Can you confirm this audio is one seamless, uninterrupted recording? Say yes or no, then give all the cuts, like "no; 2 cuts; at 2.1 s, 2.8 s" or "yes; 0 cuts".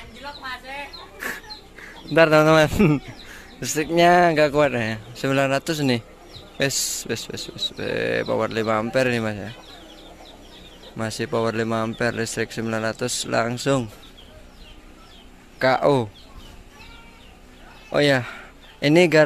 yes; 0 cuts